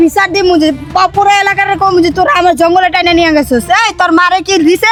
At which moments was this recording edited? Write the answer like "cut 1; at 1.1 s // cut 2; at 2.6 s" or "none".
none

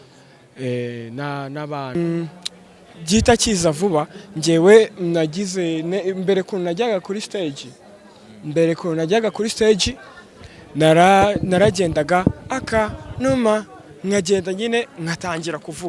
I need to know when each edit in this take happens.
cut 1; at 2.0 s

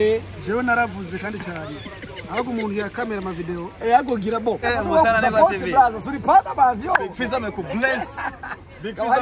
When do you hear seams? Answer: cut 1; at 4.6 s

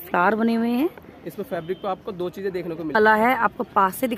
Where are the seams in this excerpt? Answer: cut 1; at 3.0 s

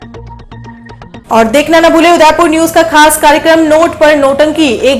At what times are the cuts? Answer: cut 1; at 1.2 s

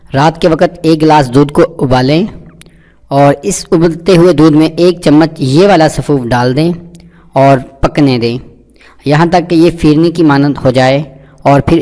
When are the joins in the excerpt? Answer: cut 1; at 5.9 s

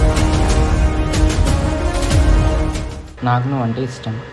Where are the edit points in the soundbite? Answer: cut 1; at 3.1 s

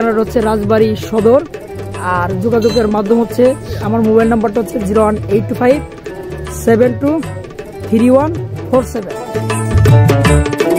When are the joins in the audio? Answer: none

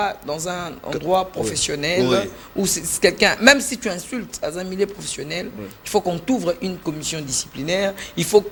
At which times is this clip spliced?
none

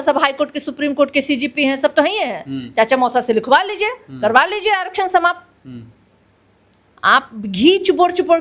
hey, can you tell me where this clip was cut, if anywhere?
none

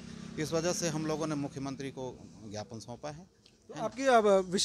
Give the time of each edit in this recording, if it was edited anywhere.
none

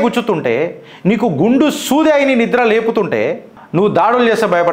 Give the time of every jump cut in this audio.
cut 1; at 3.6 s

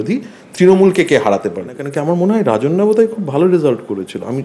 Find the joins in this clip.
cut 1; at 1.9 s

